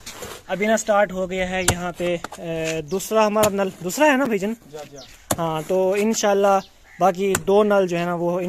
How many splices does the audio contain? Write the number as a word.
zero